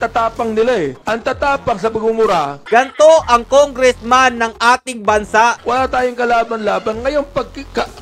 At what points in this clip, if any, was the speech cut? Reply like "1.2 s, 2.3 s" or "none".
2.5 s, 5.6 s